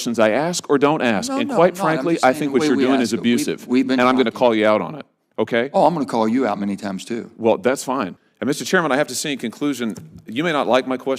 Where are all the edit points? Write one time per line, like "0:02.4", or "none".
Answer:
0:08.2

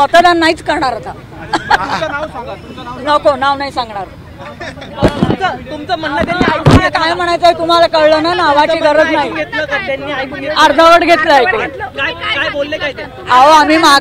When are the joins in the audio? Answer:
none

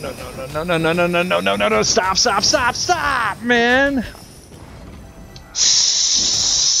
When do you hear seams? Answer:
0:04.6

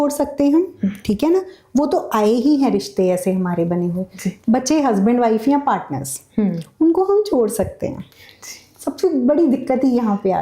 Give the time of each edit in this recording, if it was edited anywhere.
0:04.2

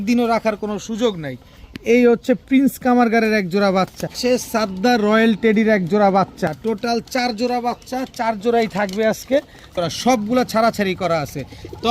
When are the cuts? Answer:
0:04.1
0:06.5
0:09.7

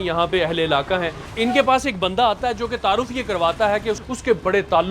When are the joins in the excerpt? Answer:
0:01.2
0:04.0

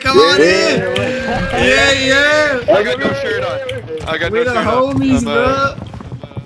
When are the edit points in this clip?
none

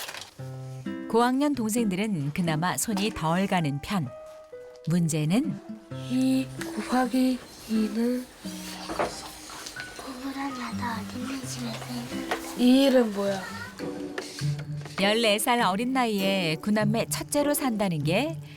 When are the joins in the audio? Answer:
0:13.6

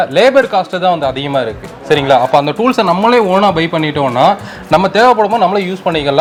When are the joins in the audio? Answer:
none

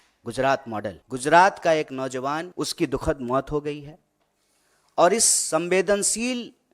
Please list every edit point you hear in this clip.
0:01.0
0:02.5

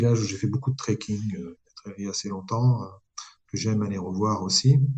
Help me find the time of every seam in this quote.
none

